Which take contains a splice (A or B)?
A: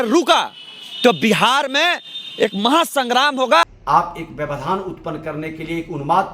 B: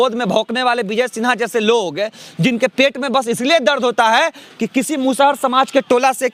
A